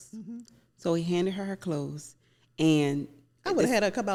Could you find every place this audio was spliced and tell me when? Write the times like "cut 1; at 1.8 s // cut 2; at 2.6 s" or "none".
none